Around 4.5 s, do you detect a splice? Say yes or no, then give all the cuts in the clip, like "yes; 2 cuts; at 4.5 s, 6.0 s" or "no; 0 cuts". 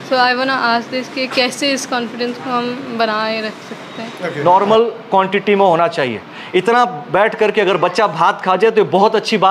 yes; 1 cut; at 4.5 s